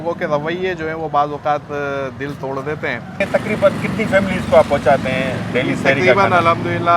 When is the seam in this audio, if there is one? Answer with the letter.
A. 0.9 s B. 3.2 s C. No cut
B